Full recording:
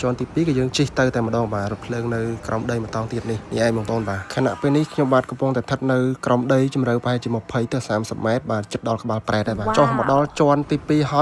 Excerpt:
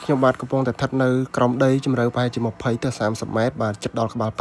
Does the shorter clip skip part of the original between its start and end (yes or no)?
no